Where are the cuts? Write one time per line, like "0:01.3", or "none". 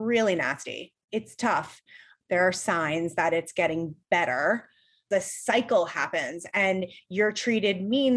0:01.8
0:05.0